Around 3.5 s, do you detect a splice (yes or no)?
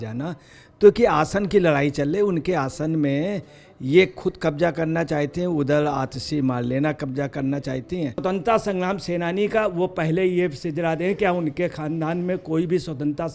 no